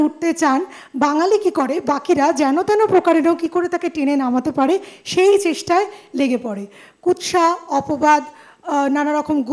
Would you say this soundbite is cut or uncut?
uncut